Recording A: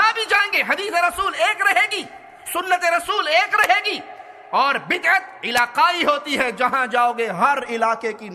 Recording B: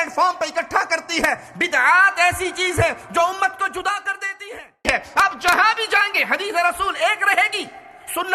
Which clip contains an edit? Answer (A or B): B